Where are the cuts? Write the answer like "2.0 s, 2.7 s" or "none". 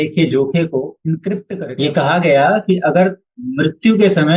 1.5 s